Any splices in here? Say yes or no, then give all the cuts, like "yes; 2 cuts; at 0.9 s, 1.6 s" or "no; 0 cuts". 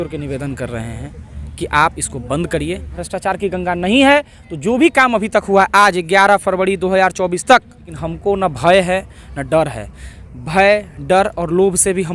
yes; 2 cuts; at 3.0 s, 8.0 s